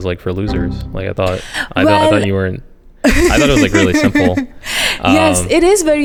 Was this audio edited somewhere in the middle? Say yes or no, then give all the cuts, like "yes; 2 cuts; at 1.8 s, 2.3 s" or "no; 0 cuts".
no; 0 cuts